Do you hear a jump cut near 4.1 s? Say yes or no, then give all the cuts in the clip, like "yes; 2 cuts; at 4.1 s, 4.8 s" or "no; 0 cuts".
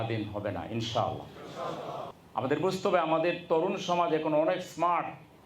no; 1 cut; at 2.1 s